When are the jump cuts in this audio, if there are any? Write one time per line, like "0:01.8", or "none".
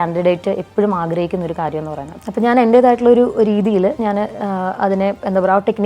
0:02.1